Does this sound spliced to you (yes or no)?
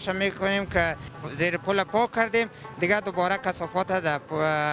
yes